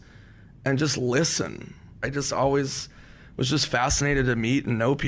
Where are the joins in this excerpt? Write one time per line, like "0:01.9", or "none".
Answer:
0:02.0